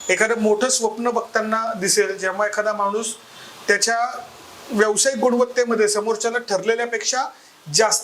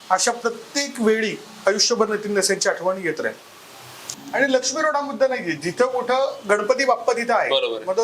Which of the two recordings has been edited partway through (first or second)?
second